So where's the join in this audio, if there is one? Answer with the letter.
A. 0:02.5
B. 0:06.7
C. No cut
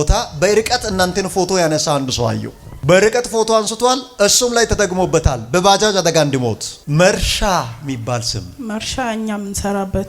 B